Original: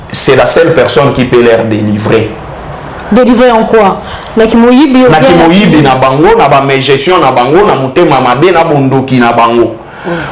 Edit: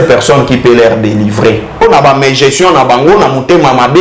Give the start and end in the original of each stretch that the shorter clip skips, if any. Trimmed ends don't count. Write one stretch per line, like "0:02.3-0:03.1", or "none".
0:02.5-0:06.3